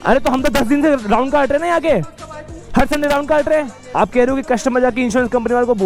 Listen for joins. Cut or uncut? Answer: cut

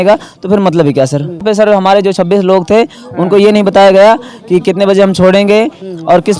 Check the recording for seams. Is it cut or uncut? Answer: cut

